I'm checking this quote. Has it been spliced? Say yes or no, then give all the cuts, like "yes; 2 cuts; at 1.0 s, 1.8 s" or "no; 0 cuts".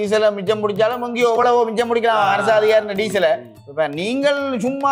no; 0 cuts